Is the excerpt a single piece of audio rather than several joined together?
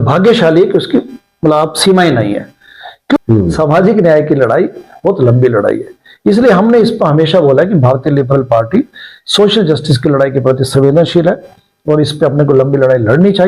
no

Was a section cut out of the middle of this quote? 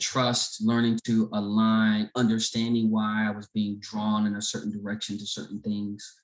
no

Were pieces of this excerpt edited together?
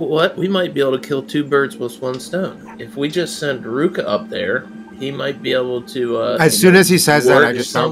no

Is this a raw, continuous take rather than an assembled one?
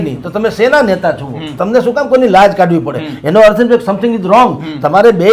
no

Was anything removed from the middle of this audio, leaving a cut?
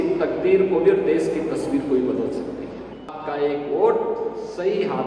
yes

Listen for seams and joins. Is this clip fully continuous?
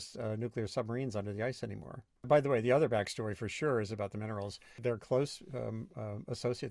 no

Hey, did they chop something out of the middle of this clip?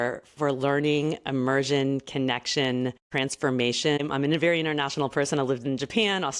yes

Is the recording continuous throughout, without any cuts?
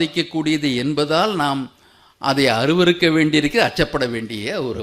yes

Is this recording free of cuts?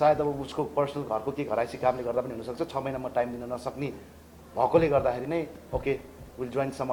yes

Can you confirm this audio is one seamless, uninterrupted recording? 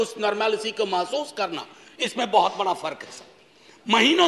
yes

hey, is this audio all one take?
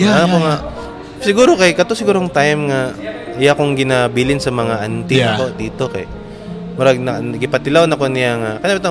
yes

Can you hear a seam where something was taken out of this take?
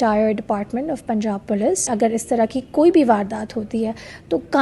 yes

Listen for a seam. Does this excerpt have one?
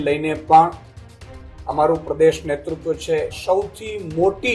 yes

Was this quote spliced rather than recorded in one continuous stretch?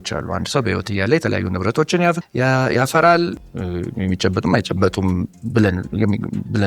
yes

